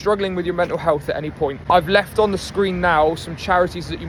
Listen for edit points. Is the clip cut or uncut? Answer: uncut